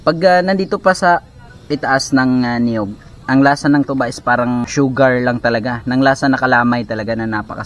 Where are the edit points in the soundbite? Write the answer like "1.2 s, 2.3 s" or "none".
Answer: 4.6 s